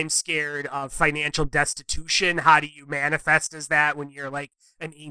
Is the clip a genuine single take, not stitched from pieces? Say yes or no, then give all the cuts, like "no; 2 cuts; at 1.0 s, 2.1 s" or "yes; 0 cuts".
yes; 0 cuts